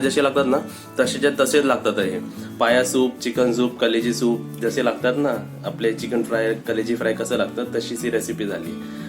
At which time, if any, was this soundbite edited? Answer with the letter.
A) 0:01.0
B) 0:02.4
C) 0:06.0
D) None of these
B